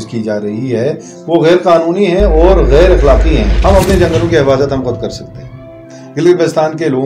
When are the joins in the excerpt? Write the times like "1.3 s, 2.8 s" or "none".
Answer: 3.5 s